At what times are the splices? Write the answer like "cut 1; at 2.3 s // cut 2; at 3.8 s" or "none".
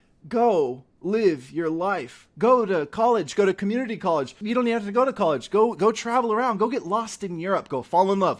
cut 1; at 4.4 s